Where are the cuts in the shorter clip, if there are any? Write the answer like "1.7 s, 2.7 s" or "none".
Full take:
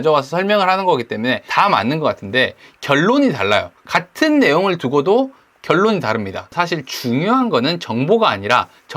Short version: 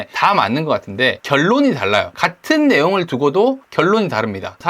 1.2 s, 2.2 s, 3.6 s